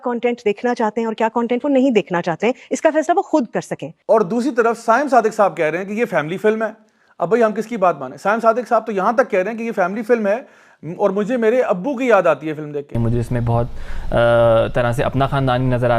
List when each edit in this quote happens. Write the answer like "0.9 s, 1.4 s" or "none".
12.9 s